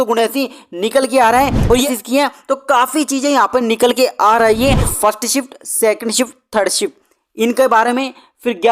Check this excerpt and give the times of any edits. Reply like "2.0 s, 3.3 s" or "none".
1.9 s, 4.9 s